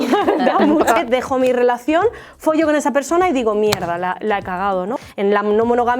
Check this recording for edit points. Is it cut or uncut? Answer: cut